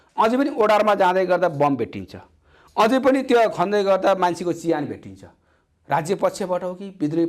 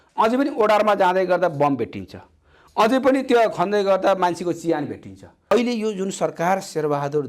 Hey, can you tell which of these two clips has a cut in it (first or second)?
second